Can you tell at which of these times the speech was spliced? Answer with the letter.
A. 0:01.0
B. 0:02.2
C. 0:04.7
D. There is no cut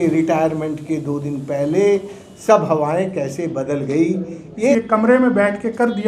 C